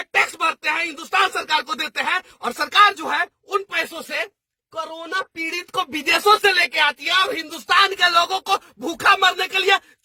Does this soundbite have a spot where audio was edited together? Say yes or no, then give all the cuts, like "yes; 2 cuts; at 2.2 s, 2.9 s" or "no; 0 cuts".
no; 0 cuts